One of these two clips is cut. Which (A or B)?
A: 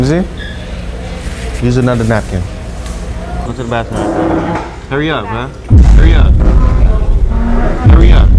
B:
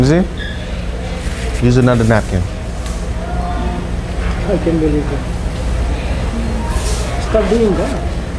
A